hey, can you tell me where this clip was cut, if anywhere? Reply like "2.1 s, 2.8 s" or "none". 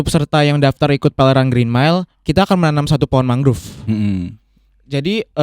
none